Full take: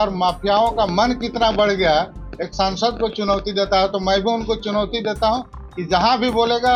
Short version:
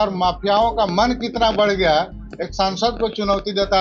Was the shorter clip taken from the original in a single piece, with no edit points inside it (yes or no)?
yes